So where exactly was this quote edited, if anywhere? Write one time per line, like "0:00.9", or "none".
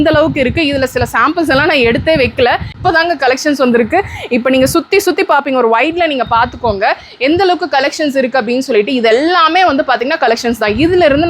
0:02.7